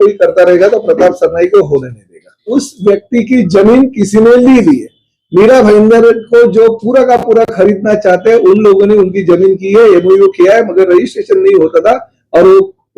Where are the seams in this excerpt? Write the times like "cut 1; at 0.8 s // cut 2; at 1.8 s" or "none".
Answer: cut 1; at 2.4 s